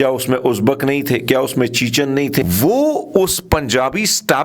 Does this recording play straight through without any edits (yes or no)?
no